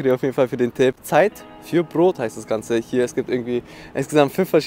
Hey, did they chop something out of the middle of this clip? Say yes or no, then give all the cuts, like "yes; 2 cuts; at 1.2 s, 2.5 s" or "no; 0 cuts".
no; 0 cuts